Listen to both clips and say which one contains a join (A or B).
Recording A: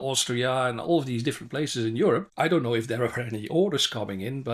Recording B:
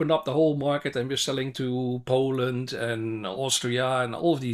A